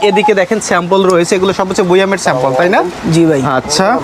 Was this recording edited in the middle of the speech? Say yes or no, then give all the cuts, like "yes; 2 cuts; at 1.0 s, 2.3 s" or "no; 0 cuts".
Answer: no; 0 cuts